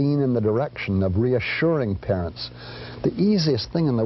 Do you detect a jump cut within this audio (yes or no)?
no